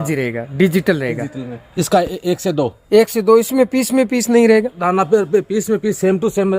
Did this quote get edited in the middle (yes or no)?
yes